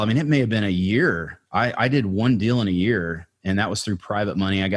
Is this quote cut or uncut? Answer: uncut